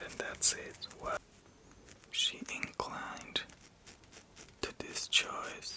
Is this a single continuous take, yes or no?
no